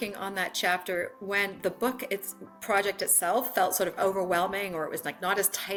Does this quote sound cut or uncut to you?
uncut